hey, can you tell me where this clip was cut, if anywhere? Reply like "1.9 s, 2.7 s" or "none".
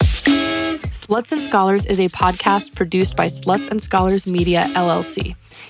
0.9 s

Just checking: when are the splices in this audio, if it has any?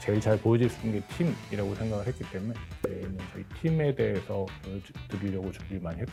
none

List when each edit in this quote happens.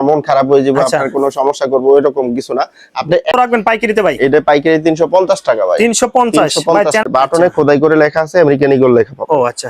3.3 s, 7.0 s

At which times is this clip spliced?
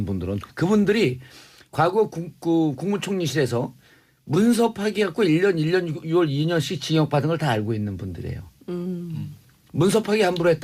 none

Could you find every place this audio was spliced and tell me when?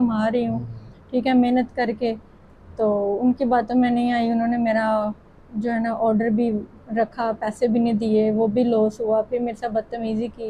none

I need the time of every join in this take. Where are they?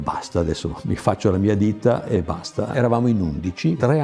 2.7 s

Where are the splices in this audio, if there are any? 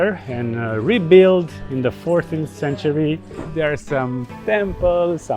3.4 s

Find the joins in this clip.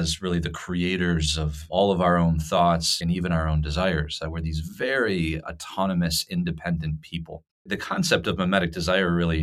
1.6 s, 3.0 s, 7.8 s

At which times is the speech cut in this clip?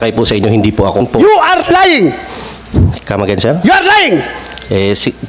1.0 s

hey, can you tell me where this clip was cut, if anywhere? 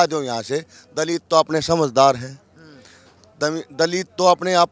none

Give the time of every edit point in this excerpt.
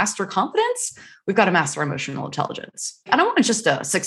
3.1 s

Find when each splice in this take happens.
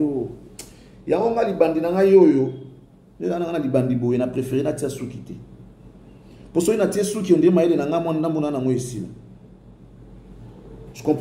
none

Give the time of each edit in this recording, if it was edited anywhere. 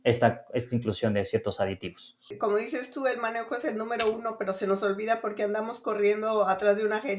2.3 s

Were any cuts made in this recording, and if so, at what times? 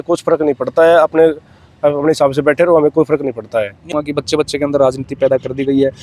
4.0 s

